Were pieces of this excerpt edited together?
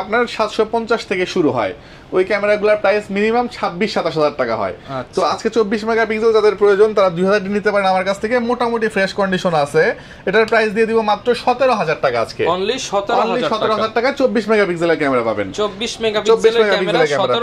no; 0 cuts

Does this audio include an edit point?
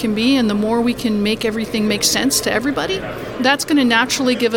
yes; 1 cut; at 3.2 s

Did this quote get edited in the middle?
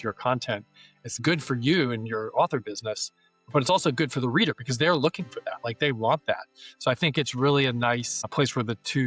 no; 0 cuts

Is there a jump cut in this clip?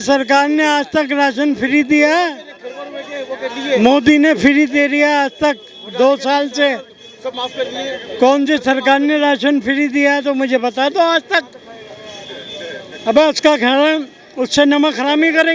no; 0 cuts

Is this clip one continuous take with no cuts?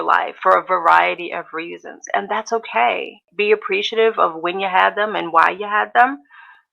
no; 1 cut; at 3.3 s

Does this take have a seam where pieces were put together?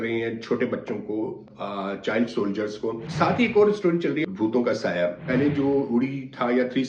yes; 3 cuts; at 3.1 s, 4.2 s, 5.2 s

